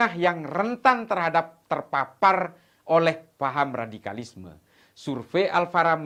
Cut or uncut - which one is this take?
uncut